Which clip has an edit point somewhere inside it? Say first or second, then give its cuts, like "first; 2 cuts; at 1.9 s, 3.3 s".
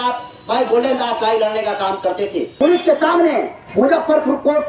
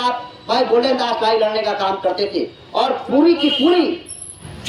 first; 1 cut; at 2.6 s